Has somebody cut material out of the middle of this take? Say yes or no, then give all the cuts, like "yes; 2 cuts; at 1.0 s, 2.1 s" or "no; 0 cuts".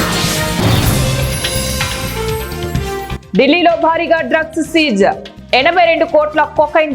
yes; 1 cut; at 3.1 s